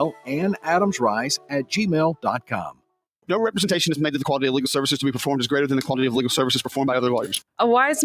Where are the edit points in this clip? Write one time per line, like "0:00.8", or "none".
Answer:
0:03.5